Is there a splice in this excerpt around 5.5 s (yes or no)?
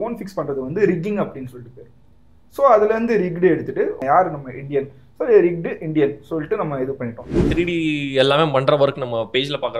no